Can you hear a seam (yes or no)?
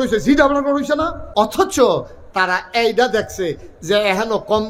yes